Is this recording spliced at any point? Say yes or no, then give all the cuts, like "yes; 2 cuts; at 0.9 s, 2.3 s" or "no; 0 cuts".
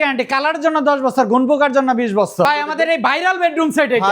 yes; 1 cut; at 2.5 s